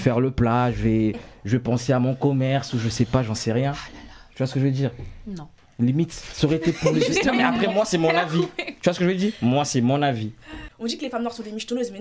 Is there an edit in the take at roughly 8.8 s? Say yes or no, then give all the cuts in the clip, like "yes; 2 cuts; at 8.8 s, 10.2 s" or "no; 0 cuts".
no; 1 cut; at 10.6 s